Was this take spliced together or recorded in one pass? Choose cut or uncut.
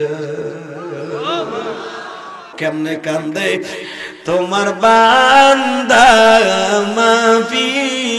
cut